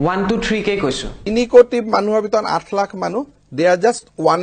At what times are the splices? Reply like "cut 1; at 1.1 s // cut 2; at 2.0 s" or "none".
cut 1; at 1.2 s